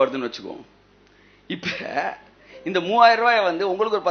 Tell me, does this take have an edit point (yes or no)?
no